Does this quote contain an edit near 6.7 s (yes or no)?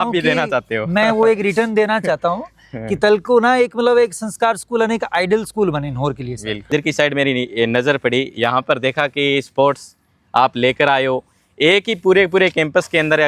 yes